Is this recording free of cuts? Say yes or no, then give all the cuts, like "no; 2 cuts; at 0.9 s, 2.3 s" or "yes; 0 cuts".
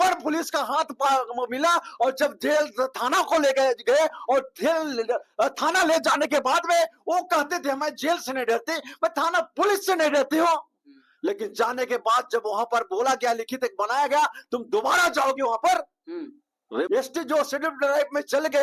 no; 1 cut; at 16.9 s